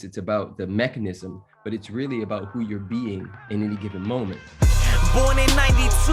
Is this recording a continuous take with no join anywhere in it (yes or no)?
no